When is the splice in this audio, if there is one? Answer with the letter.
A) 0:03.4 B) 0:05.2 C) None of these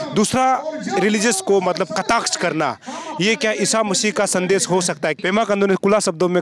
B